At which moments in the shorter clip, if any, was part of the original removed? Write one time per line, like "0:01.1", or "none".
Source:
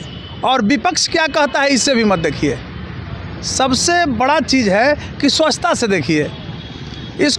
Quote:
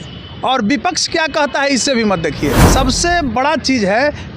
0:02.6